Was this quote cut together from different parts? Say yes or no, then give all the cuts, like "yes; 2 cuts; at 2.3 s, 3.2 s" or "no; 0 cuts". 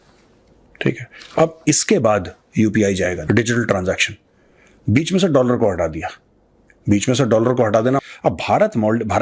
yes; 2 cuts; at 3.2 s, 8.0 s